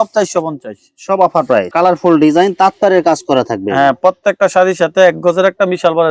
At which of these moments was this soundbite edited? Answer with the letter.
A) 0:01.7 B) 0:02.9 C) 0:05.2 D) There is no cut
A